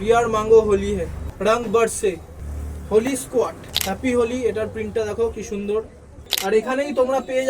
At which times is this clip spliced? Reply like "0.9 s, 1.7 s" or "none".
1.2 s, 6.2 s